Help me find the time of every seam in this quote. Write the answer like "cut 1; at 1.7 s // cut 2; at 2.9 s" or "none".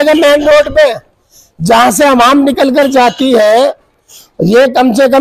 none